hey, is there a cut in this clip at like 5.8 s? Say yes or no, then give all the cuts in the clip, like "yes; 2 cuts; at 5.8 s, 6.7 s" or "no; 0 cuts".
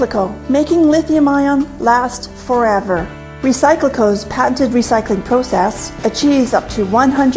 no; 1 cut; at 2.2 s